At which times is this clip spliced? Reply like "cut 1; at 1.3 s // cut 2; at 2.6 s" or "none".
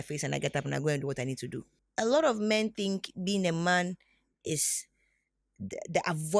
cut 1; at 1.7 s

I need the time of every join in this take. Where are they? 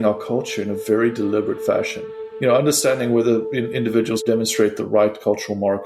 cut 1; at 4.2 s

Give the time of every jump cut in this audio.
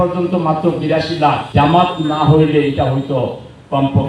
cut 1; at 1.4 s

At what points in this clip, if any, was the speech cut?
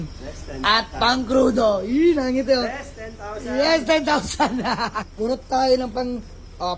cut 1; at 5.0 s

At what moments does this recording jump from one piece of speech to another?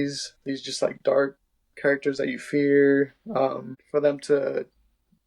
cut 1; at 3.7 s

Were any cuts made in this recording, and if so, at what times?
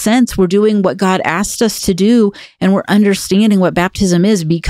none

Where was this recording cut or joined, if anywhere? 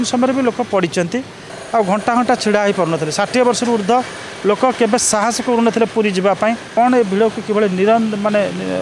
cut 1; at 1.5 s // cut 2; at 6.7 s

